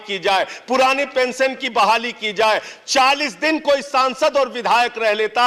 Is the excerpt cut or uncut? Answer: uncut